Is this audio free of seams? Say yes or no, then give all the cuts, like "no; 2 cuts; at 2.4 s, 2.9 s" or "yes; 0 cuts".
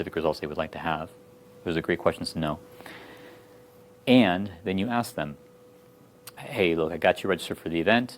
no; 1 cut; at 6.4 s